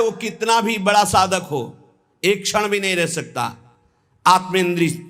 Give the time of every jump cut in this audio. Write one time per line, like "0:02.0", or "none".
none